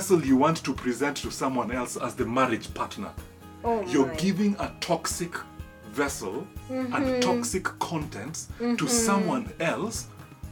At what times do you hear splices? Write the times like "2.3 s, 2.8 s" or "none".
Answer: 2.0 s